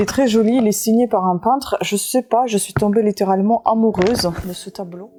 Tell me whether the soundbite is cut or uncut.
uncut